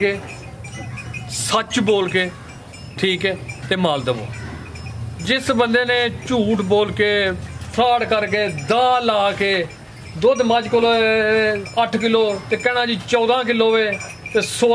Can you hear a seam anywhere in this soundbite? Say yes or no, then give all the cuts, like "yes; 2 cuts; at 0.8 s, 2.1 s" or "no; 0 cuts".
no; 0 cuts